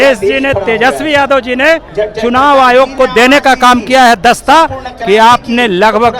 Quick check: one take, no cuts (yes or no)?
yes